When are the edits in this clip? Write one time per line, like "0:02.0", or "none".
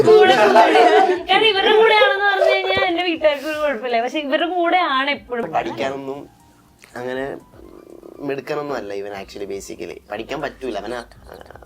0:05.5